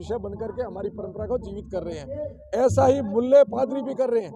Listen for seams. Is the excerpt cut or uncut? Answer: uncut